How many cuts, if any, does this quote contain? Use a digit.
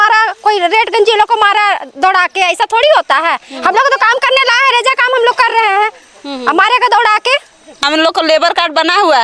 1